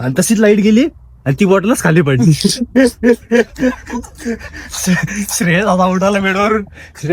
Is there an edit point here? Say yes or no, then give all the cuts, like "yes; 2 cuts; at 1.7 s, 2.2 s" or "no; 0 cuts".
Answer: no; 0 cuts